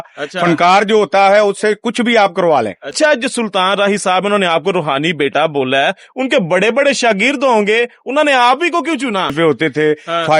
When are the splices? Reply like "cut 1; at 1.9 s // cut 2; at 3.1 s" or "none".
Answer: cut 1; at 2.8 s // cut 2; at 9.3 s